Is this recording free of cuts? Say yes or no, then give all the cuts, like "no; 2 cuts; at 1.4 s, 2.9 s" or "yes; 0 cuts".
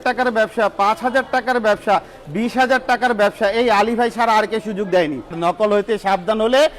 no; 1 cut; at 5.3 s